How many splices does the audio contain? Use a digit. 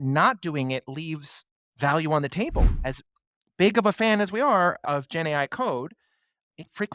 1